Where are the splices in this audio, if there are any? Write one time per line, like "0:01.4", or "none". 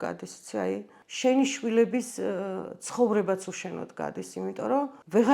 0:01.0